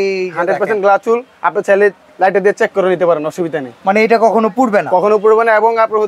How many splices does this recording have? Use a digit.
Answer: 0